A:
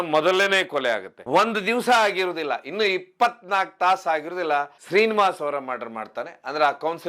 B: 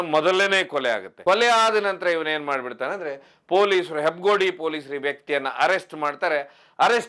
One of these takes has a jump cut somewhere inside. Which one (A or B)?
A